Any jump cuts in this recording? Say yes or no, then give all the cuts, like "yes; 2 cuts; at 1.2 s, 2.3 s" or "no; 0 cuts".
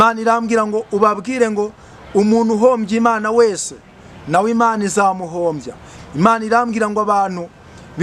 no; 0 cuts